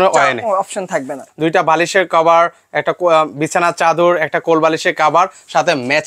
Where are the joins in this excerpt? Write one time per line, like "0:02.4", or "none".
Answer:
0:01.3